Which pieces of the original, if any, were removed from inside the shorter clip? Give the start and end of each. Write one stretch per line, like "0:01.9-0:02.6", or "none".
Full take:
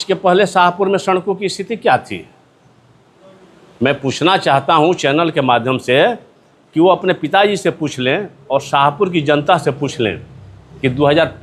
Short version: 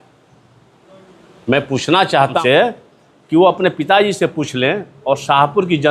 0:04.7-0:05.8

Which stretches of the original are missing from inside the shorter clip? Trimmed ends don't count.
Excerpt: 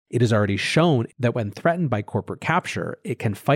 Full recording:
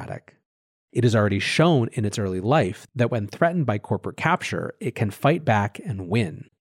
0:01.9-0:02.9

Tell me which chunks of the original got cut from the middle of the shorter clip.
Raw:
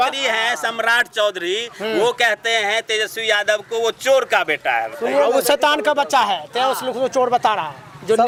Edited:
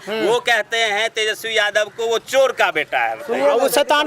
none

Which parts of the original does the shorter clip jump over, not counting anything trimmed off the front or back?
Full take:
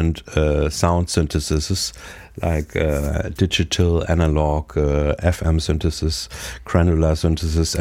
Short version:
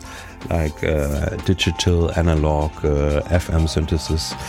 none

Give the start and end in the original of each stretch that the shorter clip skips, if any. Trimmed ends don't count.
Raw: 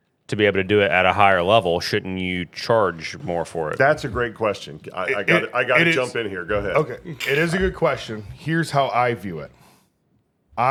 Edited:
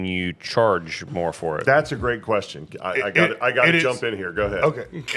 none

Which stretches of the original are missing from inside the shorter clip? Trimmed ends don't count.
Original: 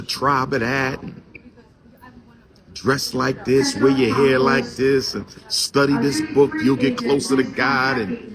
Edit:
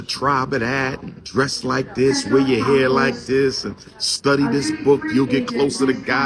0:01.1-0:02.6

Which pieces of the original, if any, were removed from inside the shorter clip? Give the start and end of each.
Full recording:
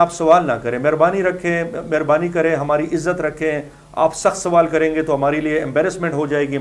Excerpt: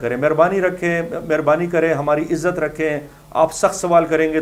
none

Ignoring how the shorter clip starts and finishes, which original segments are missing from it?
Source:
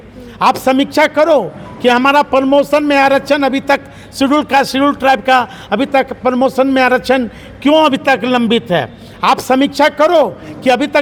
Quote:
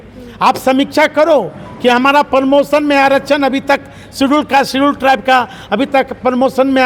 none

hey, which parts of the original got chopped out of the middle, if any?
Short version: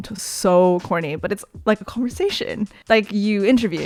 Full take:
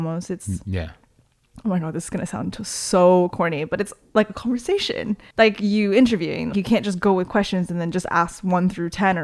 none

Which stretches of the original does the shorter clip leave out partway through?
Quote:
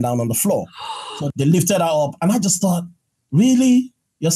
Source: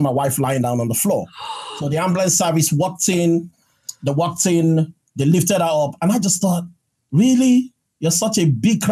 0:01.8-0:05.0

